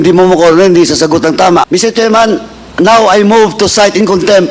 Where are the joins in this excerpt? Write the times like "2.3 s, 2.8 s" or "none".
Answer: 1.7 s